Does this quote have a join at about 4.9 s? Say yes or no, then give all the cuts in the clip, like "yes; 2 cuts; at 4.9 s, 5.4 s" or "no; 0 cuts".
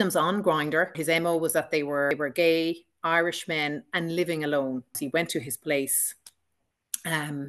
yes; 3 cuts; at 1.0 s, 2.1 s, 4.9 s